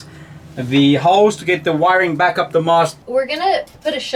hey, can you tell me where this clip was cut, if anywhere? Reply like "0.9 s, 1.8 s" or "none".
3.0 s